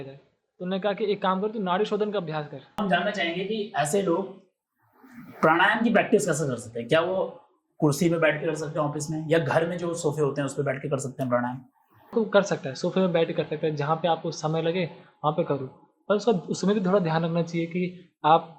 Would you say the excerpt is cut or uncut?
cut